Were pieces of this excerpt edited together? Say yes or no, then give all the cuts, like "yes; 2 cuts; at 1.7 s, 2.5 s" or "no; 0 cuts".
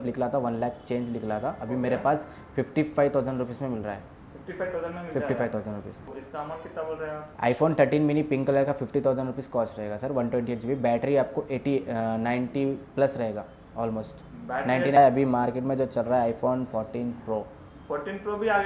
yes; 2 cuts; at 6.1 s, 15.0 s